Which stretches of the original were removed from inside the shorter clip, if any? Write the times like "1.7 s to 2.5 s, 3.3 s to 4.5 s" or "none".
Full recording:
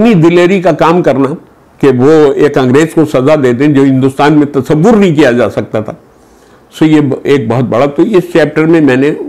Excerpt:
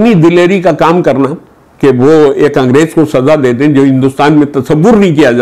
none